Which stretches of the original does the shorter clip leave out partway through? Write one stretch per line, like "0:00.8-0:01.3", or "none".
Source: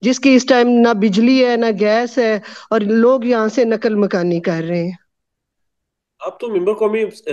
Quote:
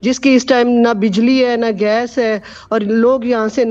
none